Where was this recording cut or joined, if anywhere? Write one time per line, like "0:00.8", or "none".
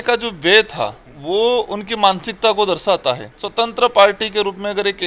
0:01.1
0:03.4